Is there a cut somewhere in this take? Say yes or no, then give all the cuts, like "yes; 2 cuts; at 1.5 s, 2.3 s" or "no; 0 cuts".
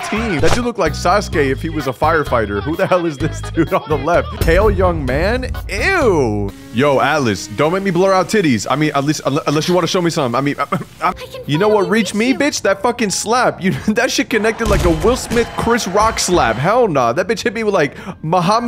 yes; 2 cuts; at 6.5 s, 11.1 s